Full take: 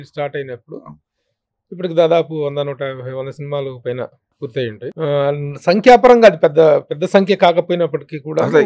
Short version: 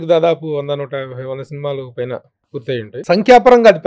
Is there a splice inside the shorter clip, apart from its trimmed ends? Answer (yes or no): yes